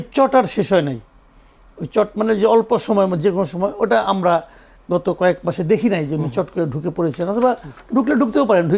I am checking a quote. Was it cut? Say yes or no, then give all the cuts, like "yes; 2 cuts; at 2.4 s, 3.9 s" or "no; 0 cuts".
no; 0 cuts